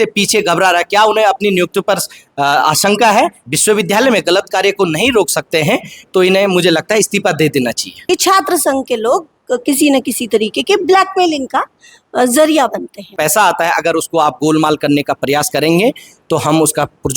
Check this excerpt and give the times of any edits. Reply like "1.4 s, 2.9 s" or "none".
3.4 s, 7.9 s, 13.1 s